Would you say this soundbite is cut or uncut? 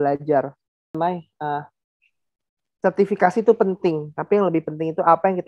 cut